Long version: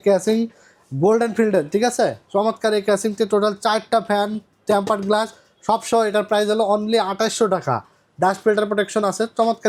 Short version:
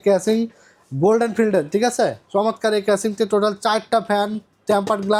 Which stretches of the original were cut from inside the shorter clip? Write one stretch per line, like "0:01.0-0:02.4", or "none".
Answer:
none